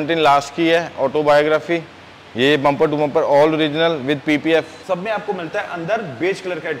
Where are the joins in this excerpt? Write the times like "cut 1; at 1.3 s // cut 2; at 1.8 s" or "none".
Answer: cut 1; at 4.8 s